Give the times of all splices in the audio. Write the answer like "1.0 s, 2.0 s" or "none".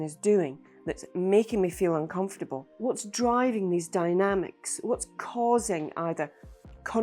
2.7 s